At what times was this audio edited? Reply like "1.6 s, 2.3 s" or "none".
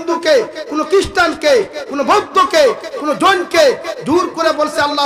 none